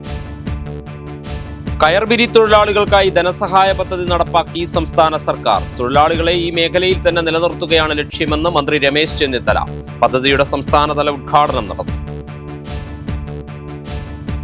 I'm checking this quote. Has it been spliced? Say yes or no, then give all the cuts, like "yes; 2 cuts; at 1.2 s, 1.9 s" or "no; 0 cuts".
yes; 1 cut; at 1.3 s